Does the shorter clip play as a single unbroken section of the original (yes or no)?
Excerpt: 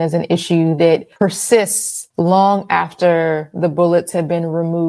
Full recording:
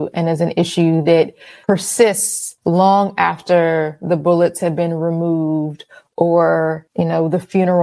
no